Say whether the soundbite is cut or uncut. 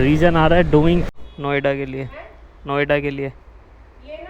cut